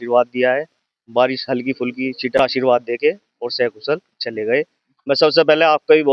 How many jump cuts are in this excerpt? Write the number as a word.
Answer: zero